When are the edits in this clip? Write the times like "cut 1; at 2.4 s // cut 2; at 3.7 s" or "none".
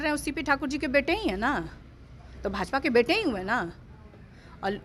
none